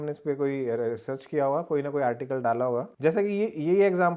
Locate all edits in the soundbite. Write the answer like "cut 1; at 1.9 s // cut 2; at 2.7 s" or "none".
none